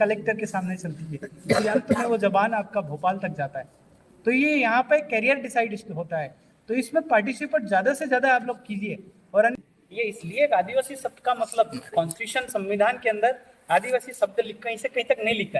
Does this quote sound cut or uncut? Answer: cut